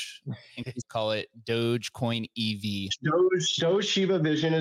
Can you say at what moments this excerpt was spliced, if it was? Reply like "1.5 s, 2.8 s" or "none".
0.8 s, 2.9 s

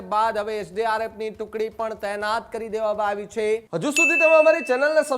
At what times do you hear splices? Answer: 3.7 s

